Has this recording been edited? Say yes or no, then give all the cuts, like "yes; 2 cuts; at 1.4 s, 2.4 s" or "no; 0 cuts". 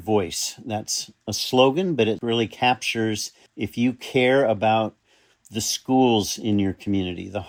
no; 0 cuts